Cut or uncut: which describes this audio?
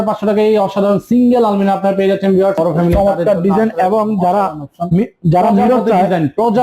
cut